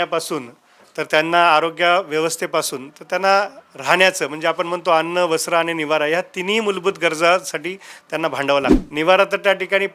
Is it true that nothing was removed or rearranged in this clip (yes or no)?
no